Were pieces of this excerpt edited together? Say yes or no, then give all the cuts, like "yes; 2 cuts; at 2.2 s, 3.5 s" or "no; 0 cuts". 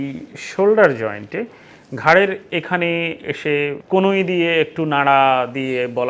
no; 0 cuts